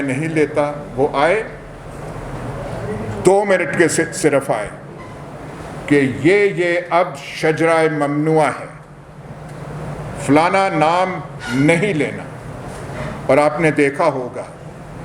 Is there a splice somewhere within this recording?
no; 0 cuts

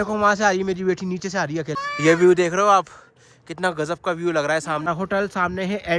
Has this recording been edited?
yes; 2 cuts; at 1.8 s, 4.8 s

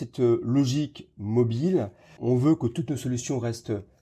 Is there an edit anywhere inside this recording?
yes; 1 cut; at 2.1 s

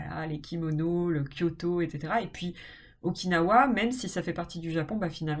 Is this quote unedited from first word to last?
yes; 0 cuts

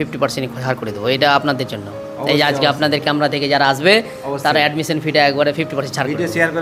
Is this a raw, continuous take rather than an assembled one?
yes; 0 cuts

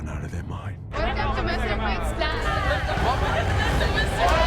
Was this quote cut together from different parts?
yes; 2 cuts; at 0.9 s, 2.6 s

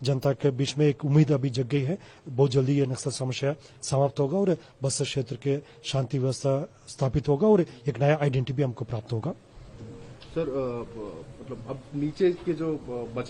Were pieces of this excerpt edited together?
no; 0 cuts

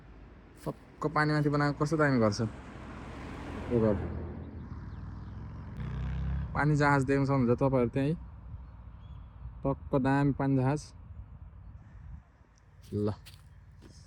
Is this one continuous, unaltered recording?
no; 1 cut; at 5.8 s

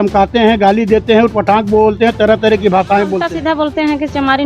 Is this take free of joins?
no; 1 cut; at 3.3 s

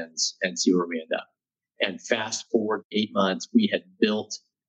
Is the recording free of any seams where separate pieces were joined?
no; 1 cut; at 2.9 s

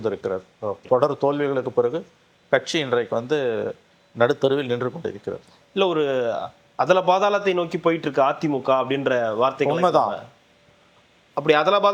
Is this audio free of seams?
yes; 0 cuts

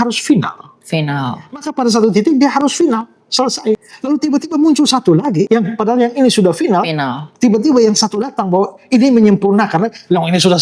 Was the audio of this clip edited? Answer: yes; 2 cuts; at 3.9 s, 5.5 s

